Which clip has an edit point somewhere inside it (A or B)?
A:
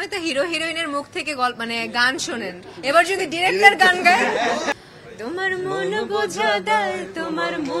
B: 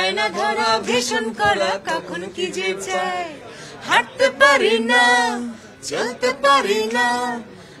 A